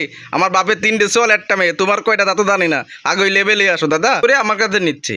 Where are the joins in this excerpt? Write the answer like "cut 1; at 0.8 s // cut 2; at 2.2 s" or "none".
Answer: cut 1; at 4.2 s